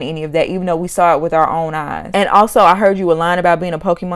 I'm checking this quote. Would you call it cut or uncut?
cut